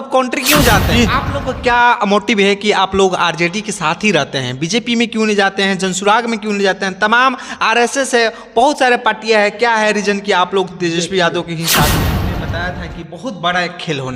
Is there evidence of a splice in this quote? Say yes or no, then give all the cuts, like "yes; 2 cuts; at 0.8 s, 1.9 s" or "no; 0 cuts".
yes; 2 cuts; at 0.8 s, 12.0 s